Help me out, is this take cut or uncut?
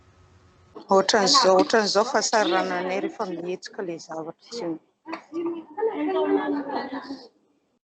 cut